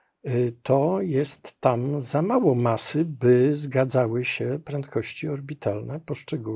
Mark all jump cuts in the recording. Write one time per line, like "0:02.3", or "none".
none